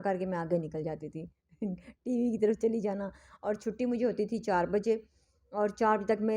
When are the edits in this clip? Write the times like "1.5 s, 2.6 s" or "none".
none